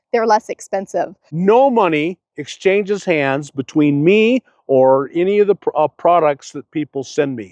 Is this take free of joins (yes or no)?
no